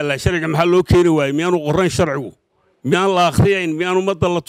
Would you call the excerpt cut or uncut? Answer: uncut